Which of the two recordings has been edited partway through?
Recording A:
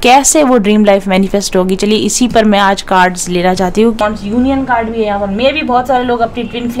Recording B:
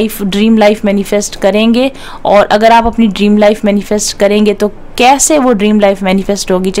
A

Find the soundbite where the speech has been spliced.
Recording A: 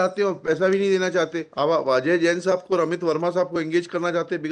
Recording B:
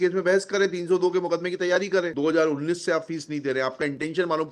B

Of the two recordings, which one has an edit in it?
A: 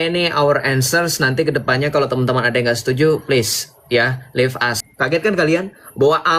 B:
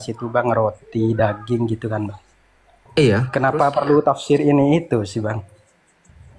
A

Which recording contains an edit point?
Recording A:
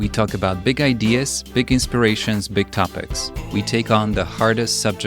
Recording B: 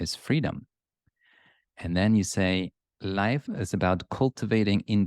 B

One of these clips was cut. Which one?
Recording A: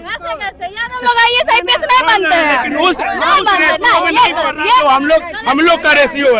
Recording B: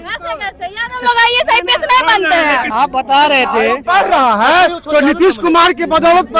B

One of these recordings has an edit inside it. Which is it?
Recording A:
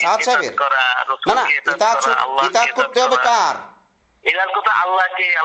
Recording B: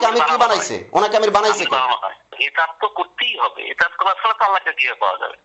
B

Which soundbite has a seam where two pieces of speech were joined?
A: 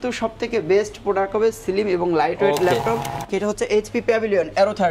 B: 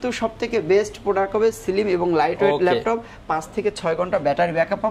A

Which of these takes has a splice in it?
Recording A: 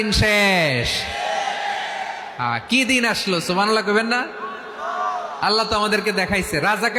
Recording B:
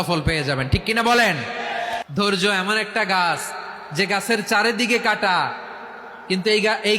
B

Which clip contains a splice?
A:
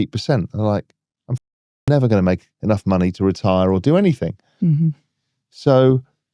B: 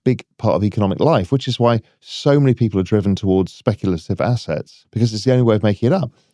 B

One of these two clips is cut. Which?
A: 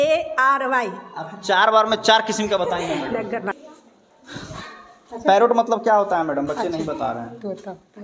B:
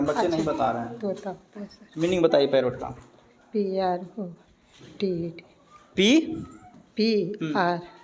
A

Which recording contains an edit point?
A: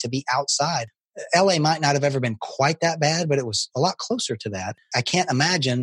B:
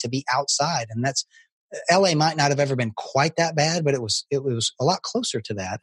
A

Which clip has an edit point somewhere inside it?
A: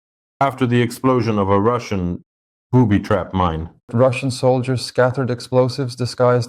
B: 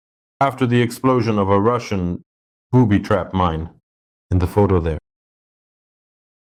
A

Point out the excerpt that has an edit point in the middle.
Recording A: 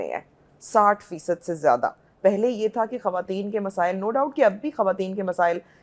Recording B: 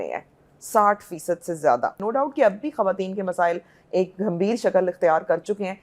B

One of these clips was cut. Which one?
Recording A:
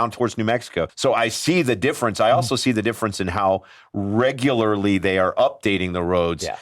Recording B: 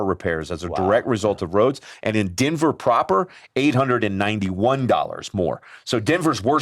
A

